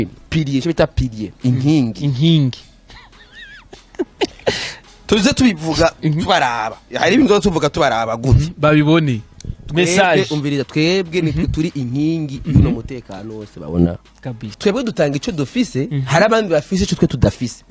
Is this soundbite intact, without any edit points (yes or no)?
no